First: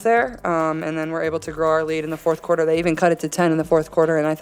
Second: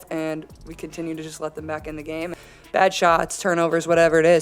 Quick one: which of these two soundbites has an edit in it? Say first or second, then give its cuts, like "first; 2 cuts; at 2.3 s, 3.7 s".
second; 1 cut; at 2.4 s